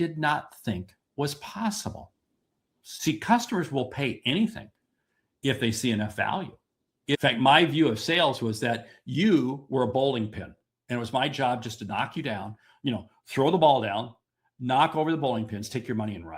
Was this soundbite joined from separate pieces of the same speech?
yes; 2 cuts; at 2.8 s, 7.1 s

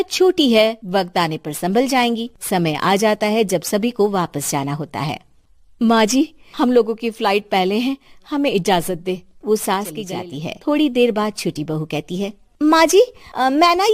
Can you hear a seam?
yes; 1 cut; at 10.0 s

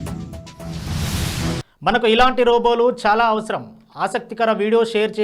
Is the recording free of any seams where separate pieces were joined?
no; 1 cut; at 1.7 s

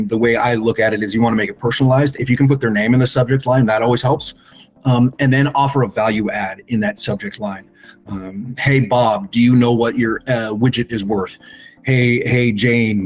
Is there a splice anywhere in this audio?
no; 0 cuts

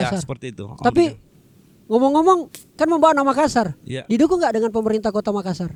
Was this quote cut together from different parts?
no; 0 cuts

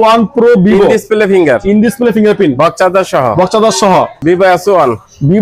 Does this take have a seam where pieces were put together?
yes; 1 cut; at 4.2 s

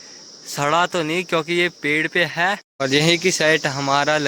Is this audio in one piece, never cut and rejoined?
no; 1 cut; at 2.7 s

